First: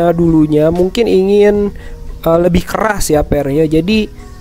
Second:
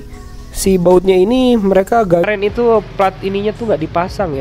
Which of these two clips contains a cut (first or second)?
second